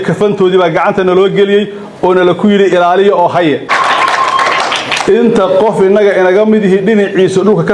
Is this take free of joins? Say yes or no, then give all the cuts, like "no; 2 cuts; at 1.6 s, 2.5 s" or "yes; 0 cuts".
no; 1 cut; at 3.7 s